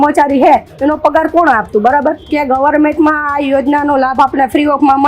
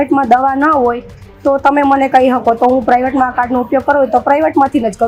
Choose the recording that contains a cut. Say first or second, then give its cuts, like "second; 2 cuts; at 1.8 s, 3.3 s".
first; 1 cut; at 2.2 s